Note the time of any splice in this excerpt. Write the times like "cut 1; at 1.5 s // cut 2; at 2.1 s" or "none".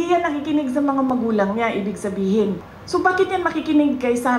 cut 1; at 2.7 s